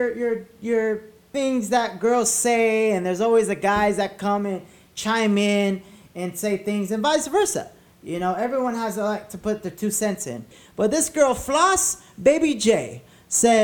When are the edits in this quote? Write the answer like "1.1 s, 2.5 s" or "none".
1.1 s, 10.6 s